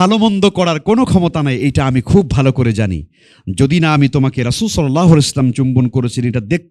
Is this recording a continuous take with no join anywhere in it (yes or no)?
yes